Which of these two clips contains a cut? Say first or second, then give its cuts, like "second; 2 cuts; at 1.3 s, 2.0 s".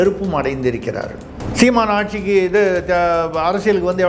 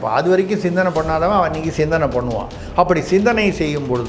first; 1 cut; at 1.4 s